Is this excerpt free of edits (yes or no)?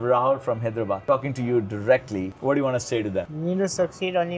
no